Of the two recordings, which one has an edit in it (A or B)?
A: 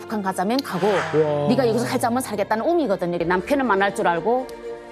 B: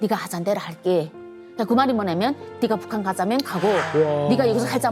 A